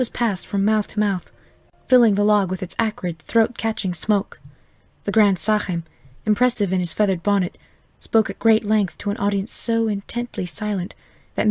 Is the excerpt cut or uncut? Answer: uncut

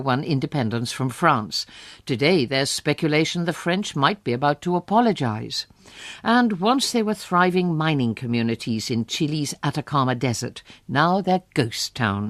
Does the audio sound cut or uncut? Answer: uncut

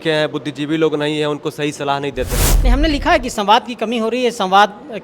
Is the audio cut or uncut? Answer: cut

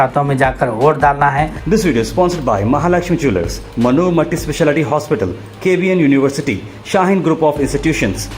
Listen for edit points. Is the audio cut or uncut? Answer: cut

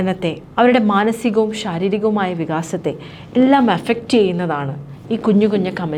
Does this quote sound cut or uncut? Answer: uncut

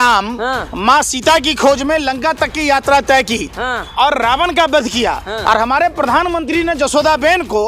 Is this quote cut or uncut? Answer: uncut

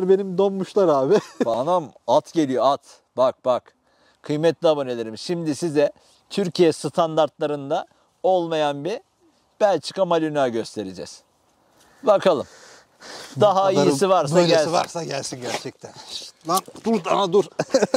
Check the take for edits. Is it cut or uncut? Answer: cut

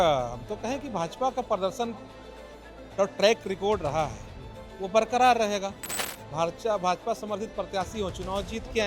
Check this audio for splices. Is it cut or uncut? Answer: uncut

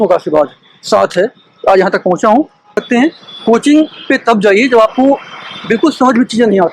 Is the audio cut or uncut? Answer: cut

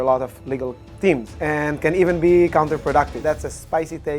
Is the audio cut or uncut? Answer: cut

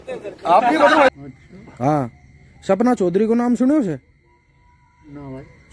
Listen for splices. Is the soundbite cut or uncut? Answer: cut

